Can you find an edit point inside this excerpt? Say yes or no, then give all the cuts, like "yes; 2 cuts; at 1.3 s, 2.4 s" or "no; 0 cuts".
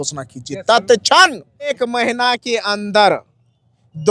yes; 1 cut; at 1.8 s